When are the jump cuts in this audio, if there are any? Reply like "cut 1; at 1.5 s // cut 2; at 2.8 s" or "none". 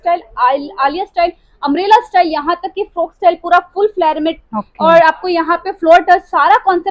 none